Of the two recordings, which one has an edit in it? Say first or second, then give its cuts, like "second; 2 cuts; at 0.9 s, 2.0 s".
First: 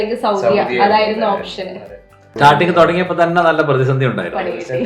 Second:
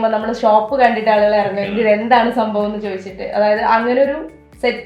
first; 1 cut; at 2.3 s